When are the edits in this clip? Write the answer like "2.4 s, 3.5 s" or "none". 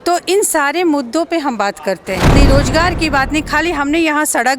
2.3 s